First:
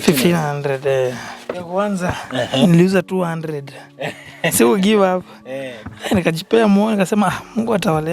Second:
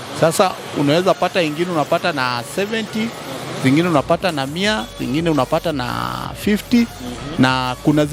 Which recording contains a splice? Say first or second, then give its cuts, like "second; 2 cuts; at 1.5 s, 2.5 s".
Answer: first; 1 cut; at 1.6 s